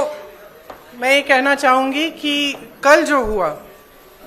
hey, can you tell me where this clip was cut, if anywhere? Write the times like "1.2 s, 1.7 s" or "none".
none